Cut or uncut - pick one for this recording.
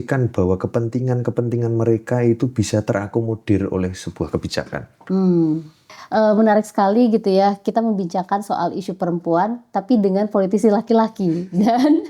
cut